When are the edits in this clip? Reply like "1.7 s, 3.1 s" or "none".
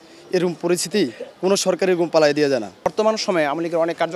2.9 s